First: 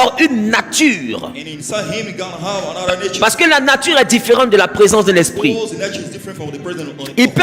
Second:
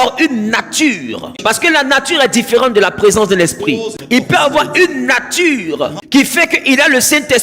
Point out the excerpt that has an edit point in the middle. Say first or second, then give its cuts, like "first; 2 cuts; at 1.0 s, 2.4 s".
second; 3 cuts; at 1.3 s, 3.9 s, 6.0 s